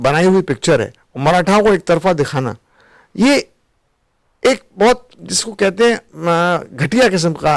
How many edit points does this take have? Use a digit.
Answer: 0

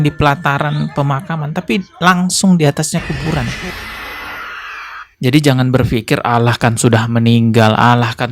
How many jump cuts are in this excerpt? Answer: 1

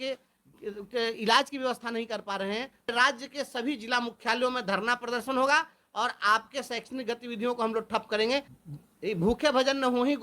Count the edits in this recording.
2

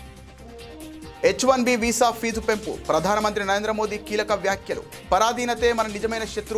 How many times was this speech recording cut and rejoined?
1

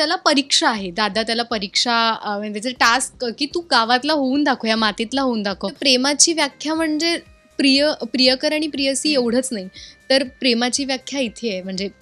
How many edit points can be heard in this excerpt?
1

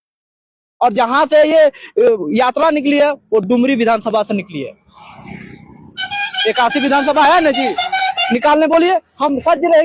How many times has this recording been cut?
0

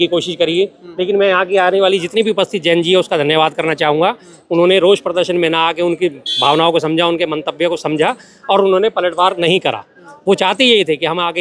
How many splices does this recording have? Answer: 0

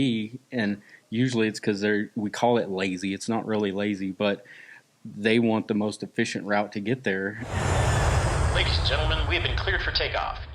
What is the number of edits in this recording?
1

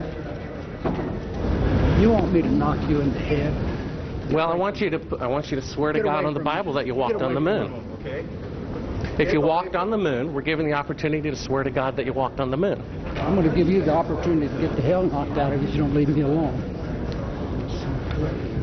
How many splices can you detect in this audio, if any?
1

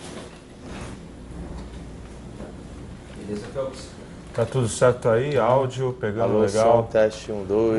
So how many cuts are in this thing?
0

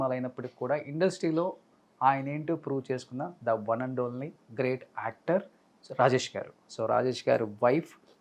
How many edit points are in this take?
1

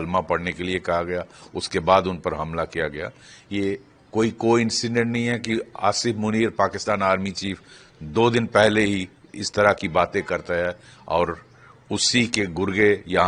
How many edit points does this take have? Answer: 0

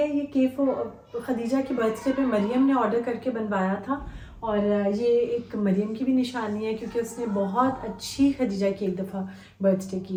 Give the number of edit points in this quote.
0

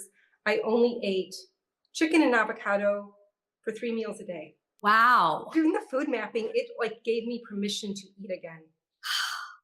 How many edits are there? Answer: 2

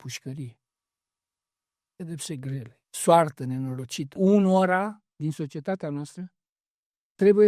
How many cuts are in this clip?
1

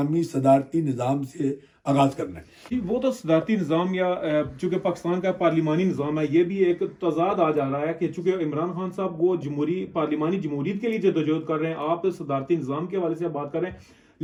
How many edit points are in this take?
0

